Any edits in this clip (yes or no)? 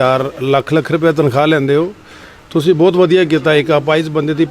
no